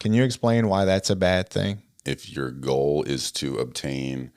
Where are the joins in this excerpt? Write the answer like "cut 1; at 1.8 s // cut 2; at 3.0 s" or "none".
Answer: cut 1; at 2.0 s